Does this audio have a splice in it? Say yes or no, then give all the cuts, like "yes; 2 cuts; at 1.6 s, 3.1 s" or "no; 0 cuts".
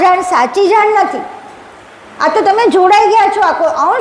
no; 0 cuts